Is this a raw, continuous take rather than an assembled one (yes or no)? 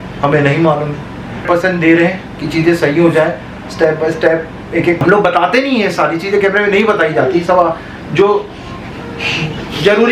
no